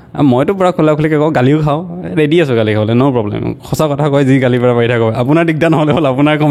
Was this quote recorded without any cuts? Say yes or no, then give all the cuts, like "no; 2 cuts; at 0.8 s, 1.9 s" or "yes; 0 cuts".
yes; 0 cuts